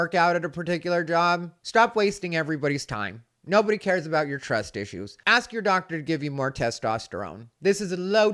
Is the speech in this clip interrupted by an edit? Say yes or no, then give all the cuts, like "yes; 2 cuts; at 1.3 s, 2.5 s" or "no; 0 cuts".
yes; 1 cut; at 5.2 s